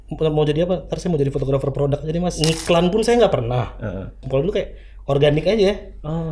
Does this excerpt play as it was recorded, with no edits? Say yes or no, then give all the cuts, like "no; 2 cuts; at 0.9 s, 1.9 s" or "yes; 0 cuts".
no; 2 cuts; at 2.4 s, 4.2 s